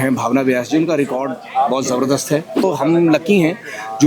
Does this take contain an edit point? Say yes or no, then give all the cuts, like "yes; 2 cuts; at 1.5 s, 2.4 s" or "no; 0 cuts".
yes; 1 cut; at 2.6 s